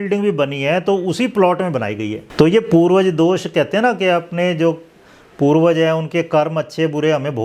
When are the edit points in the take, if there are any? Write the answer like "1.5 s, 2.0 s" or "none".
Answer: 2.2 s